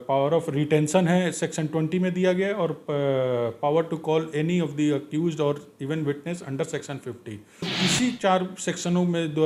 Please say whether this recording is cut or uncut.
cut